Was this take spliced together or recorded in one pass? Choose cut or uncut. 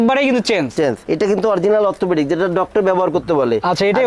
cut